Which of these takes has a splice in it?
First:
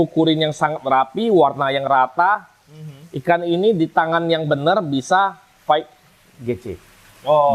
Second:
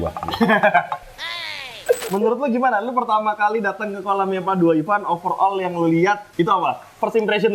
second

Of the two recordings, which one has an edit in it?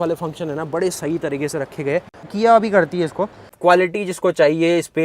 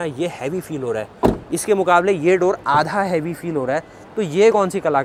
first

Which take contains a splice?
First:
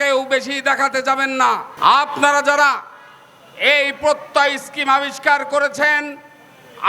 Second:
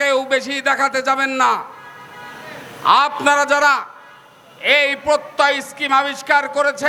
first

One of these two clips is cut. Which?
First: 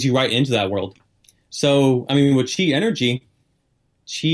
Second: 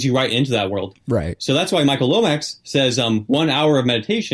first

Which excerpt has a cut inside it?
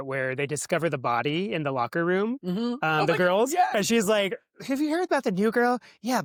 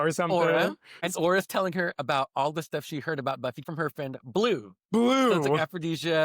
second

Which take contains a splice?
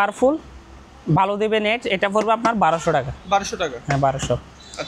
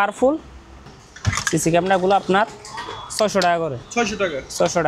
second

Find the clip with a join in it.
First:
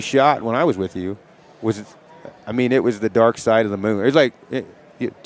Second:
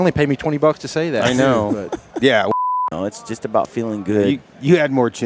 second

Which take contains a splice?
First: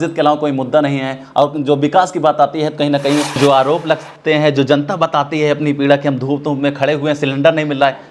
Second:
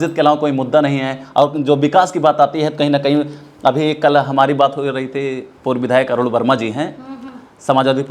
first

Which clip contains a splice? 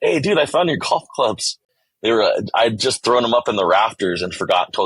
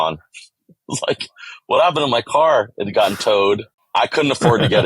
second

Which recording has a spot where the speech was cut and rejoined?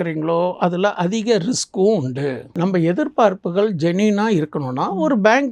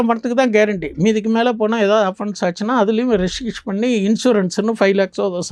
first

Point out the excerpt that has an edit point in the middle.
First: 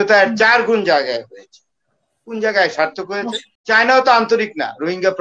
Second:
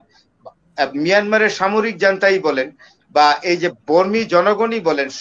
first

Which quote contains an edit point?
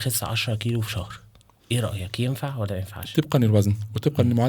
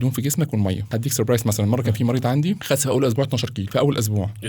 second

